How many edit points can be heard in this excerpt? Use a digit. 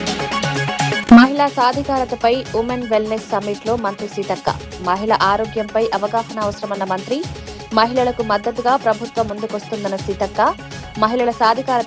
1